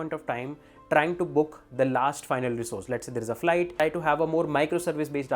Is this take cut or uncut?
cut